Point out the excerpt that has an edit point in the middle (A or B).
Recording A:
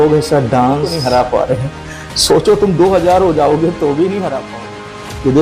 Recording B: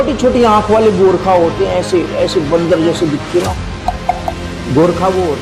A